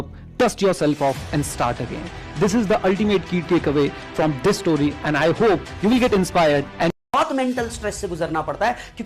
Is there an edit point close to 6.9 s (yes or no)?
yes